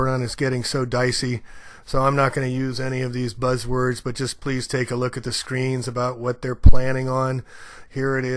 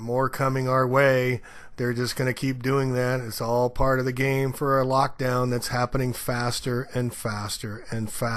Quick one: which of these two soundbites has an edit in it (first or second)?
second